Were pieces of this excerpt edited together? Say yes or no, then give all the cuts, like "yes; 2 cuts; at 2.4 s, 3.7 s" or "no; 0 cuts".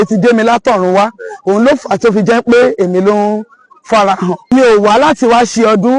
yes; 1 cut; at 4.4 s